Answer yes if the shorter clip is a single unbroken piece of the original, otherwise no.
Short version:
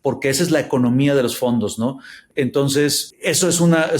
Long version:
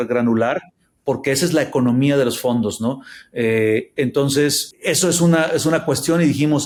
no